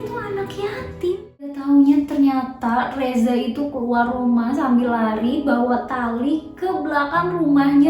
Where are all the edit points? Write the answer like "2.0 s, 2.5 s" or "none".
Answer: 1.6 s